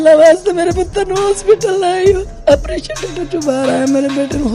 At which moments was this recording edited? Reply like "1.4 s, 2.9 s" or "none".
2.3 s